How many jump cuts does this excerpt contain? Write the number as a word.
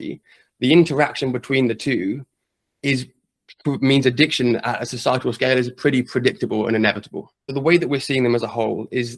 one